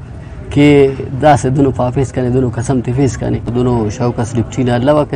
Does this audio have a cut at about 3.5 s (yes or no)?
yes